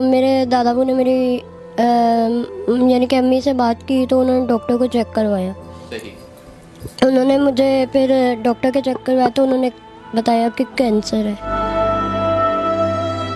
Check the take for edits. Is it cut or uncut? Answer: uncut